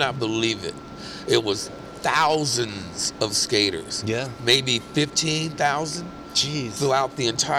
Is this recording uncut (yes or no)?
yes